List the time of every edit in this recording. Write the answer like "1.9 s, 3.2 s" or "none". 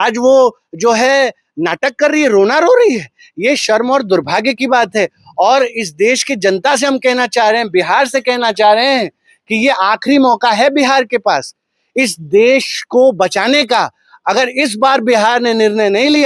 none